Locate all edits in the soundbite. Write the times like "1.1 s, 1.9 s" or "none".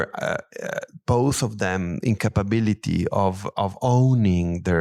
none